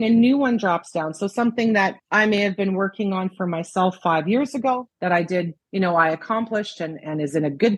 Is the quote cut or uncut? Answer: cut